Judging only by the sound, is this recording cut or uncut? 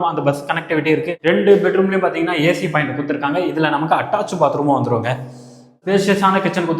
cut